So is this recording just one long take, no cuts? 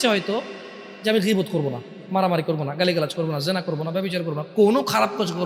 yes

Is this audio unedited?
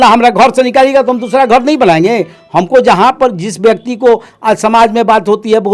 yes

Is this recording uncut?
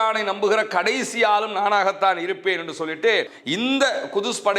no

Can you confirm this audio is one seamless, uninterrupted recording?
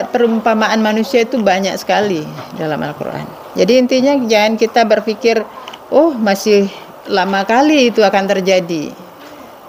yes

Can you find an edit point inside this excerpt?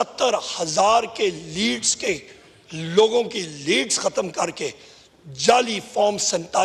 no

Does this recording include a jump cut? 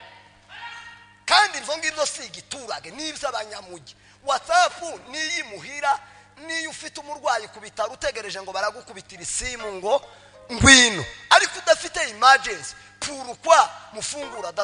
no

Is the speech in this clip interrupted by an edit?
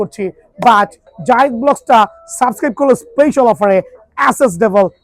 yes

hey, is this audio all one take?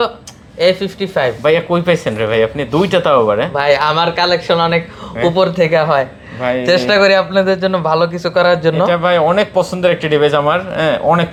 yes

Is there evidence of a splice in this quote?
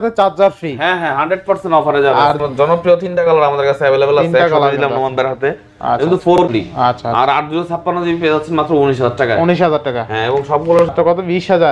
yes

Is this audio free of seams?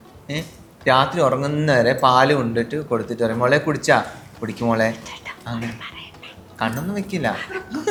yes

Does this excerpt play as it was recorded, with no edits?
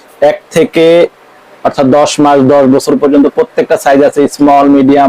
yes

